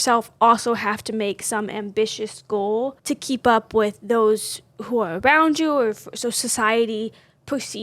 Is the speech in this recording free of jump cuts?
no; 1 cut; at 3.0 s

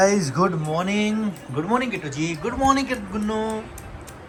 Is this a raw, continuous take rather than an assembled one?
yes; 0 cuts

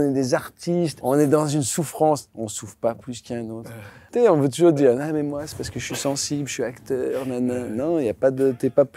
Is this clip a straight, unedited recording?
no; 2 cuts; at 1.0 s, 3.9 s

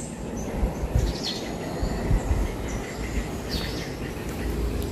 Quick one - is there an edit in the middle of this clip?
no; 0 cuts

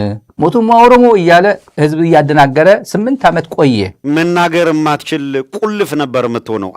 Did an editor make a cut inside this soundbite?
yes; 1 cut; at 3.9 s

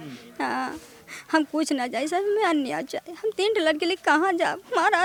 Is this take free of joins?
yes; 0 cuts

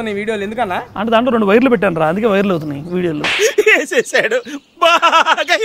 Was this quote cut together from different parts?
no; 0 cuts

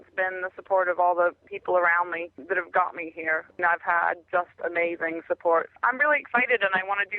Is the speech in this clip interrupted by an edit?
yes; 4 cuts; at 1.5 s, 2.3 s, 3.5 s, 5.7 s

